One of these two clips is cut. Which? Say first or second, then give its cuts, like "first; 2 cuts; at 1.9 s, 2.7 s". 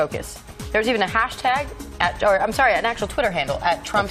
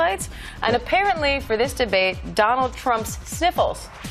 second; 1 cut; at 2.8 s